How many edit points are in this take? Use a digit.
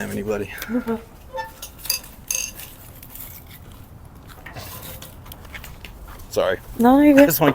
1